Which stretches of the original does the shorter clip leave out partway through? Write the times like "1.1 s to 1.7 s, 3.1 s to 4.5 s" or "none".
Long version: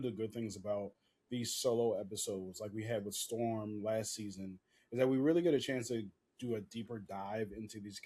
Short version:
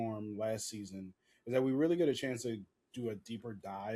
none